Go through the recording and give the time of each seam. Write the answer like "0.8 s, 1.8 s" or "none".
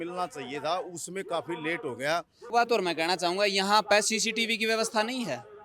2.5 s